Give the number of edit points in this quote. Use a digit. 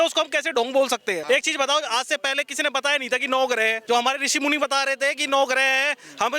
2